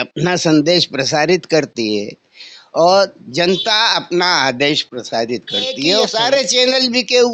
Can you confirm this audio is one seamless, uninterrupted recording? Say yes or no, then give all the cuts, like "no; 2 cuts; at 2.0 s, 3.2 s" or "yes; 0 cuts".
no; 1 cut; at 6.0 s